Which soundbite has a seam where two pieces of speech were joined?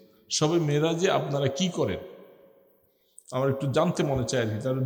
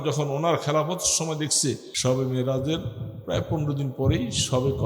second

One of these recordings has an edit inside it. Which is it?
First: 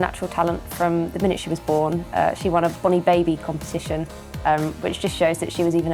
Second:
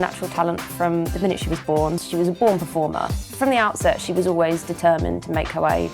second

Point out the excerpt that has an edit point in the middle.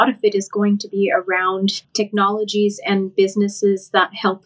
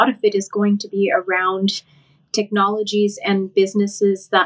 first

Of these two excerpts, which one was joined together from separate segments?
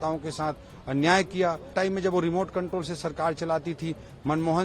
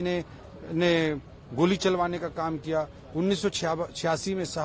first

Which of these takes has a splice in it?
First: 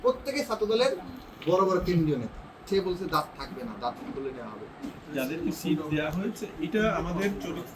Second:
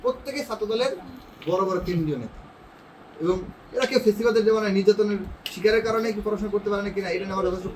first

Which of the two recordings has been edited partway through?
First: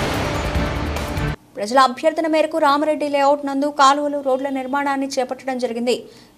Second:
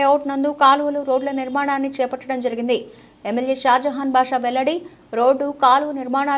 first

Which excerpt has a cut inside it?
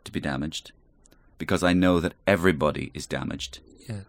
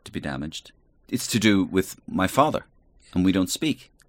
second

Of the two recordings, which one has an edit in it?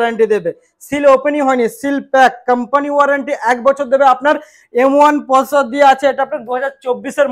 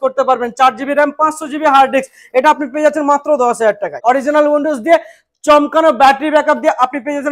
second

